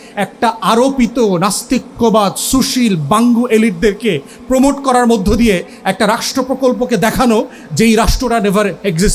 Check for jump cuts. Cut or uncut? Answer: uncut